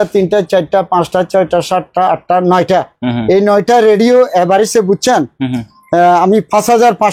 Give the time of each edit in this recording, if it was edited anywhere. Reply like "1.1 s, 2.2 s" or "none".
none